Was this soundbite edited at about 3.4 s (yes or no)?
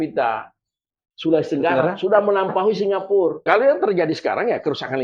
yes